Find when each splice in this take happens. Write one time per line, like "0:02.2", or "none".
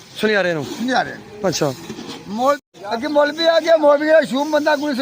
0:02.6